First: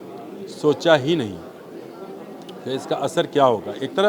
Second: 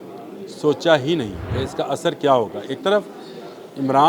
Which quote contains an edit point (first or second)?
second